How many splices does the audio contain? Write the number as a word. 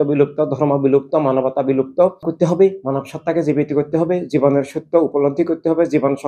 one